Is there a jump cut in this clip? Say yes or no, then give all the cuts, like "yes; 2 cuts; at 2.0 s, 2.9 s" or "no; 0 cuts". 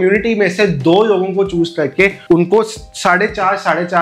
yes; 1 cut; at 2.2 s